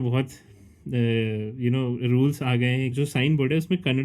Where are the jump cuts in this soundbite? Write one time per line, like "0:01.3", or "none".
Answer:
0:02.9